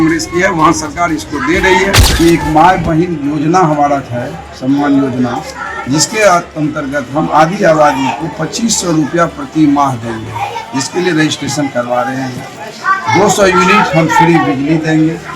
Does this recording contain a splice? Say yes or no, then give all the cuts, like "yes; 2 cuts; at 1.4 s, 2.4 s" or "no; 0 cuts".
yes; 1 cut; at 2.0 s